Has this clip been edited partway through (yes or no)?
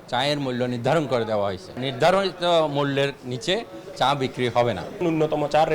yes